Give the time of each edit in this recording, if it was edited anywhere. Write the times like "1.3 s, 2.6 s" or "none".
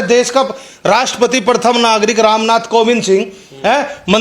none